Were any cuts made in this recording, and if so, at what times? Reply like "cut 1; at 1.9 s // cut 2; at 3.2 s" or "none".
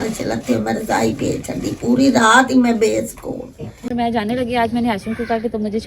cut 1; at 3.9 s